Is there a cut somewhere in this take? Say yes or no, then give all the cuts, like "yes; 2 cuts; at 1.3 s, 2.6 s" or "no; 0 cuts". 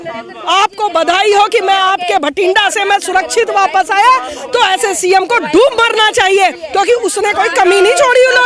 no; 0 cuts